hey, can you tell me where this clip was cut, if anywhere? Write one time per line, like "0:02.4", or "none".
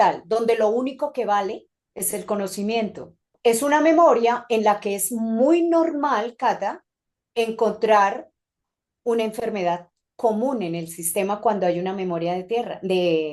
0:03.3